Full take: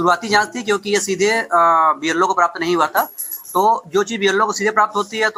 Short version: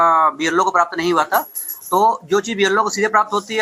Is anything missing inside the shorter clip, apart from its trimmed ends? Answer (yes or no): no